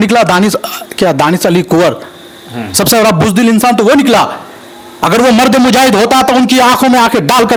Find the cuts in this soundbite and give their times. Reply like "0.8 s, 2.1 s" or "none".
none